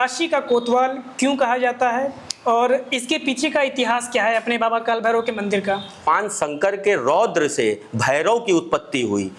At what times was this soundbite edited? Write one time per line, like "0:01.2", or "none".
0:06.1